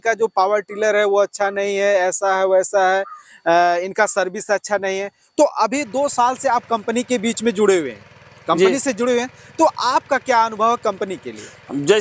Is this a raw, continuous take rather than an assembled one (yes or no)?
yes